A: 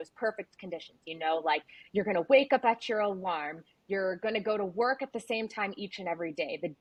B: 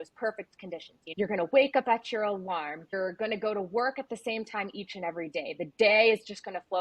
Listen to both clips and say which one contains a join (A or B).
B